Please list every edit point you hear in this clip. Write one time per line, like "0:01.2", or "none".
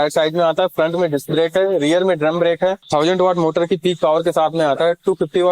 0:02.8